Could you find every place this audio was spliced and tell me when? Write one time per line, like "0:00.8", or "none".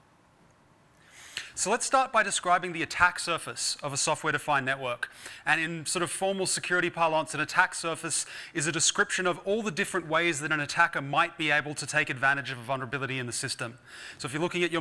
none